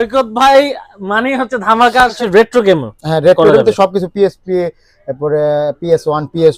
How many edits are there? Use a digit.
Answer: 1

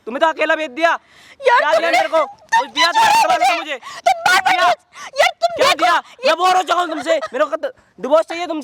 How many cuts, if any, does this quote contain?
0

